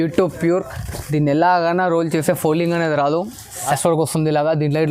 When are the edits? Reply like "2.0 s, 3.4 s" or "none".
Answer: 3.7 s